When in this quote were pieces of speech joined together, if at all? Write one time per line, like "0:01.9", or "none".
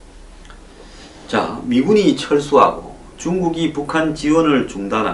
0:03.8